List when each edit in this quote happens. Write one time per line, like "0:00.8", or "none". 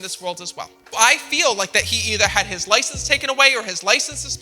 0:00.9